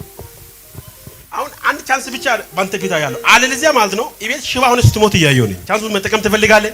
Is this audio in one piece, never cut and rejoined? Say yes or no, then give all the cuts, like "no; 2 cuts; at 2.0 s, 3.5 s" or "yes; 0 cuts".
no; 1 cut; at 5.6 s